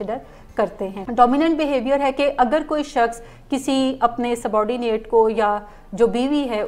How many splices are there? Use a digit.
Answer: 1